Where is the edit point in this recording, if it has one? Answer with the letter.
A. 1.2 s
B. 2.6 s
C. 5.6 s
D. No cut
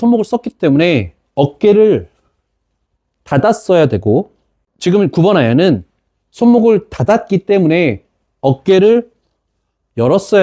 D